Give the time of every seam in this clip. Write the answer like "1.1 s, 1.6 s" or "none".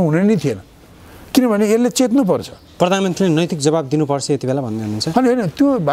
none